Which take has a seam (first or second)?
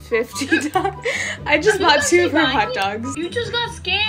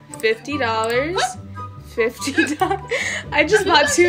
first